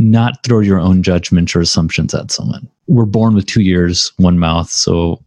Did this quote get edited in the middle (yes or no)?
yes